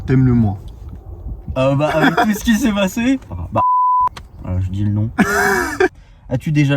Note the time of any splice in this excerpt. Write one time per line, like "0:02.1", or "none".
0:03.3
0:05.9